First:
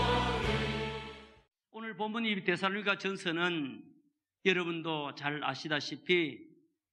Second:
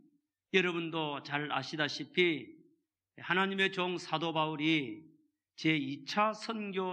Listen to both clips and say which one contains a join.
second; 1 cut; at 5.3 s

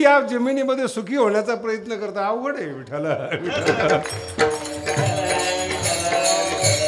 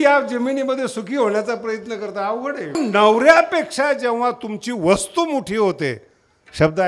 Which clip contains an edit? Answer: second; 1 cut; at 2.8 s

